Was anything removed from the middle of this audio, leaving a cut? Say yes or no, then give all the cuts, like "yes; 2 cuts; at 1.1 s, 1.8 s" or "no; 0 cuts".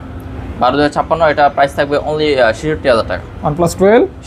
no; 0 cuts